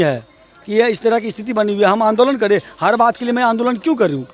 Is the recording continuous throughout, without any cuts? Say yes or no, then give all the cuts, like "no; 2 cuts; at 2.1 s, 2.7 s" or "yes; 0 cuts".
yes; 0 cuts